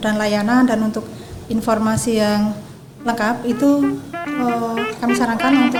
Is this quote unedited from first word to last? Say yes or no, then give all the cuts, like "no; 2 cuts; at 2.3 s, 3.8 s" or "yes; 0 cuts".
yes; 0 cuts